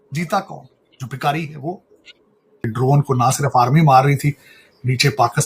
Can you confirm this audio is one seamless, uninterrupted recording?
no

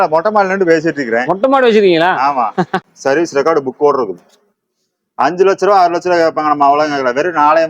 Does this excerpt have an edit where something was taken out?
yes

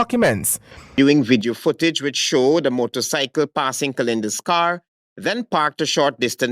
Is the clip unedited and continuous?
no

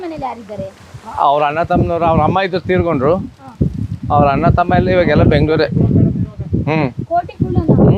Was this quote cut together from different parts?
no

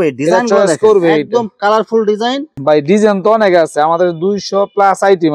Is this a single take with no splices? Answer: no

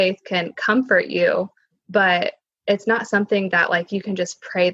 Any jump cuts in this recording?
no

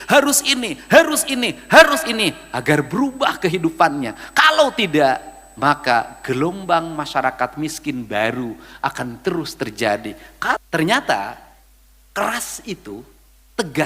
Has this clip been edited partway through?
yes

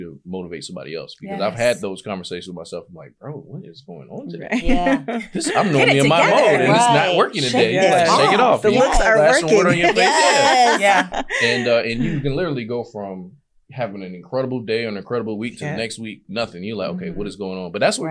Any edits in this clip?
no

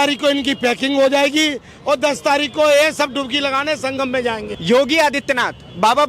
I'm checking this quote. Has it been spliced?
yes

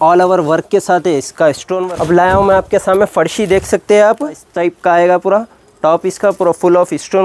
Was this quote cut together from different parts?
yes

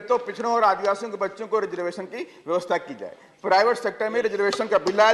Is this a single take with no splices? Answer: yes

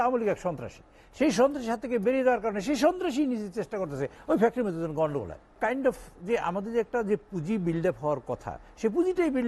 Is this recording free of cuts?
no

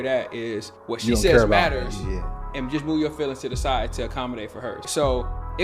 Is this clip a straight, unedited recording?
yes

